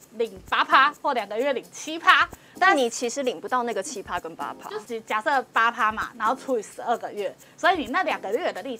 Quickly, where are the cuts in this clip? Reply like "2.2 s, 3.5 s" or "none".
4.6 s

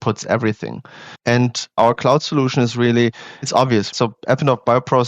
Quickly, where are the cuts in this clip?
1.4 s

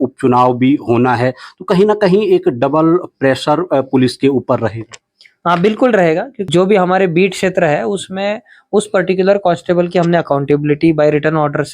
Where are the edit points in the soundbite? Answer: 6.4 s

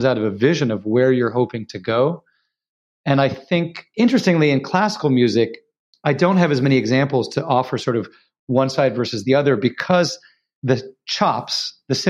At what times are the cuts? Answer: 3.8 s, 10.6 s

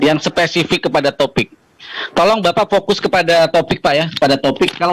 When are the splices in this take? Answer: none

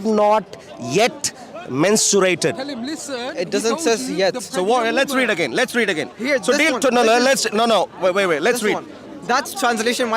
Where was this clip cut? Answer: none

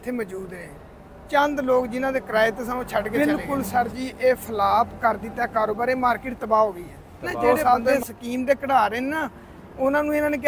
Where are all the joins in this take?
3.2 s, 7.9 s

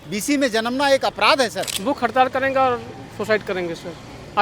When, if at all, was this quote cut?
1.7 s

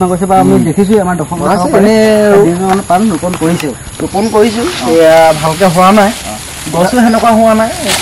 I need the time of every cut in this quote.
none

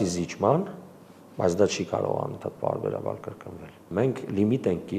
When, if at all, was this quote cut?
3.8 s

